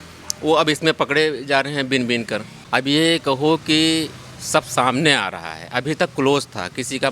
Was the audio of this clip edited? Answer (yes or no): yes